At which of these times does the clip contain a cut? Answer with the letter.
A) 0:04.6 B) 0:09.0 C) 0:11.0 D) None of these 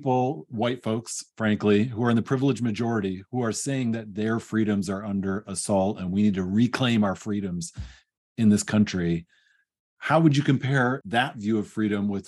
C